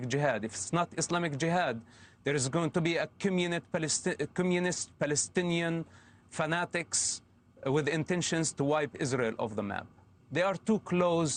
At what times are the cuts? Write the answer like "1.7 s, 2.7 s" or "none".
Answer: none

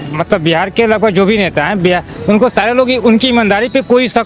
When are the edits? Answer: none

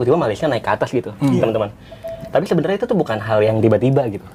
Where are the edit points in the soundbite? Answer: none

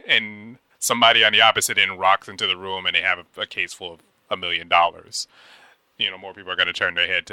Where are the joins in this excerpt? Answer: none

